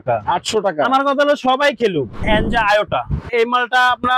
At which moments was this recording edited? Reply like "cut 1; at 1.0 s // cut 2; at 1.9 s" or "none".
cut 1; at 2.2 s // cut 2; at 3.3 s